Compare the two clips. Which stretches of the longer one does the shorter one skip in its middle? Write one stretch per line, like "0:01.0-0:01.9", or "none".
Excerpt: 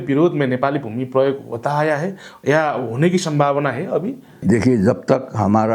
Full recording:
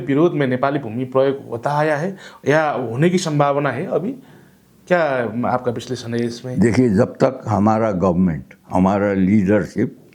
0:04.3-0:06.4